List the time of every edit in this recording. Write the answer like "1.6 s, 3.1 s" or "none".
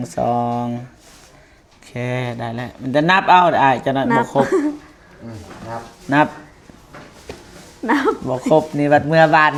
none